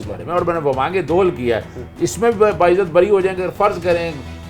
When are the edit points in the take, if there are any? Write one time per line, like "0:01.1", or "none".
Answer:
none

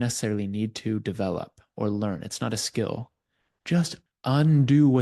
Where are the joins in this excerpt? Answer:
0:04.0

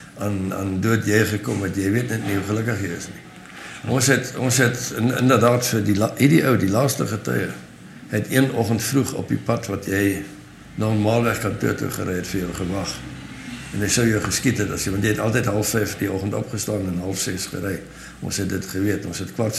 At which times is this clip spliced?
none

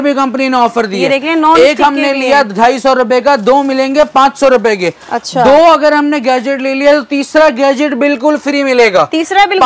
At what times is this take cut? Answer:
none

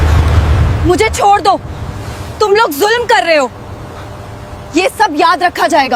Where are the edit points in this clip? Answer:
none

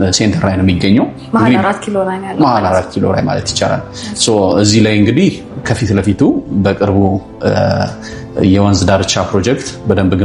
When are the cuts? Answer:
none

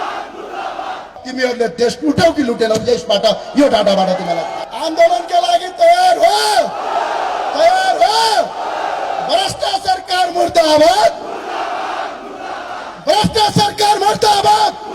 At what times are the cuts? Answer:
0:01.2
0:04.6

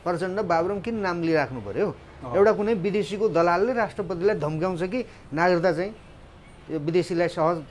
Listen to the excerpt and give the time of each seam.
none

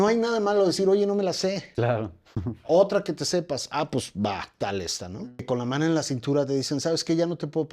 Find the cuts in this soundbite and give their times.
0:05.3

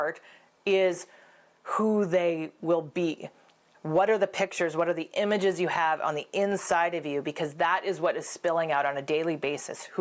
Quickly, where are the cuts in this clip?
0:03.7

